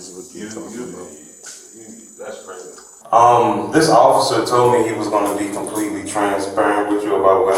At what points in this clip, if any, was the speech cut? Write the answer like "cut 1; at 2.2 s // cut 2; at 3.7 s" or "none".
cut 1; at 3.0 s